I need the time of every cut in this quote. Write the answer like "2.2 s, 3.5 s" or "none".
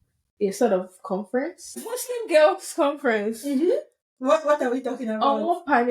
1.9 s